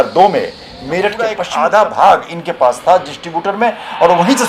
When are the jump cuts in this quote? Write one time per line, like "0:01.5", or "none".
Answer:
0:01.4